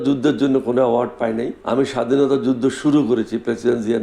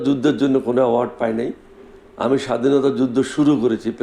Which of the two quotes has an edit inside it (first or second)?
first